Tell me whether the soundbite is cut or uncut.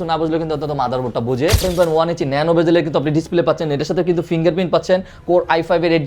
cut